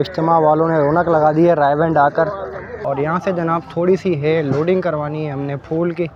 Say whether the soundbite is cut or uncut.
cut